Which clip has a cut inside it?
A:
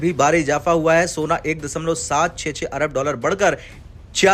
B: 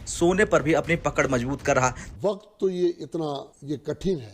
B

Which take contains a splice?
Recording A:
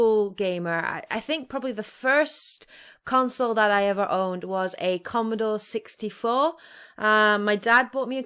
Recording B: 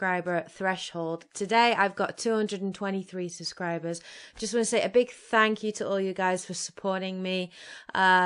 A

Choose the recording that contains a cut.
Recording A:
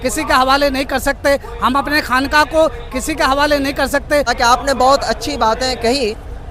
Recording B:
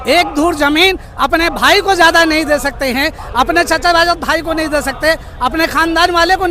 A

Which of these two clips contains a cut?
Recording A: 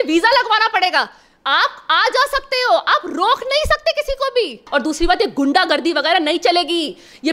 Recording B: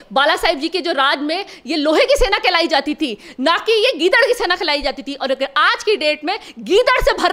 A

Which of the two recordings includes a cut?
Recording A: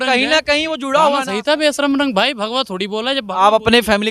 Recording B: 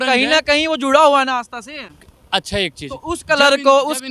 A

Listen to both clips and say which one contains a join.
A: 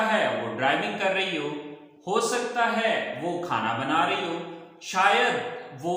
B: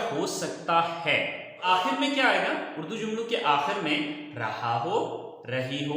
B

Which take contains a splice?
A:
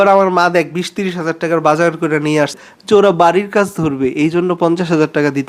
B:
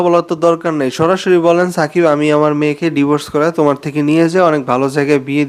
A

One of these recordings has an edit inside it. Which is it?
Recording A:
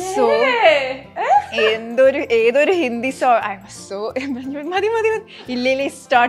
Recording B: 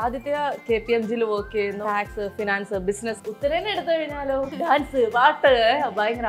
B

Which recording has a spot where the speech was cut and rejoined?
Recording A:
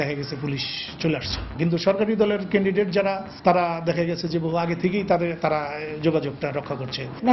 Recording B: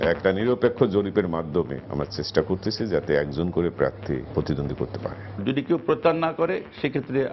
B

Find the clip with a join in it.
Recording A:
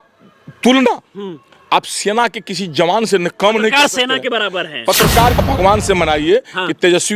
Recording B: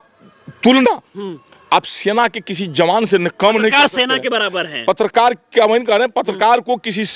A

